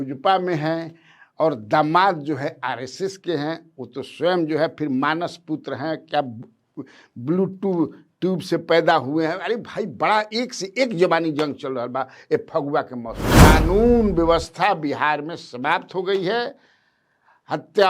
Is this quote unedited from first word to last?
no; 1 cut; at 13.4 s

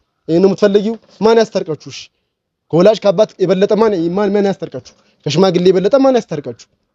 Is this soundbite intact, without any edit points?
yes; 0 cuts

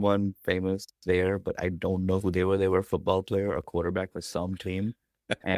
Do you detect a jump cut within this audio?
no; 0 cuts

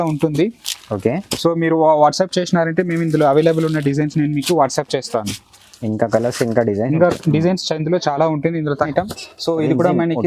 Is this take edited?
yes; 1 cut; at 8.9 s

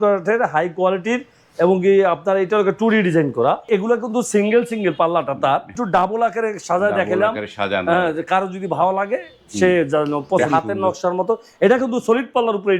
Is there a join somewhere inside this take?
yes; 3 cuts; at 3.7 s, 5.8 s, 10.4 s

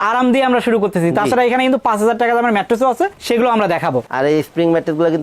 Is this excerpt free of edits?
no; 1 cut; at 4.1 s

